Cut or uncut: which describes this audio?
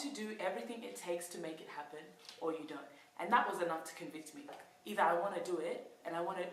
cut